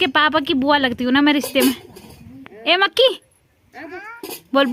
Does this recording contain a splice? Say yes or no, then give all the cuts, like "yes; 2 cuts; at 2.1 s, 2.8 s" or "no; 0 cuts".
no; 0 cuts